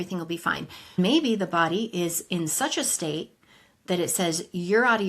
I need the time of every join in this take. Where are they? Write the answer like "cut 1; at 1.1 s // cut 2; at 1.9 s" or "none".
cut 1; at 1.0 s